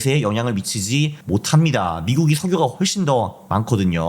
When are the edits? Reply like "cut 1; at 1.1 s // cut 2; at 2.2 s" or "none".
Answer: cut 1; at 1.2 s